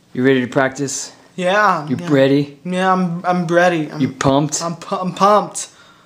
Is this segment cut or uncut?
uncut